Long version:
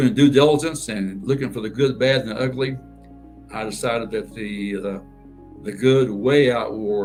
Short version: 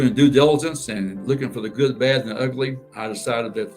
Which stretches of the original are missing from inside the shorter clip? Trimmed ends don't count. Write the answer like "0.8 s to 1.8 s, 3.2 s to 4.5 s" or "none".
2.9 s to 3.4 s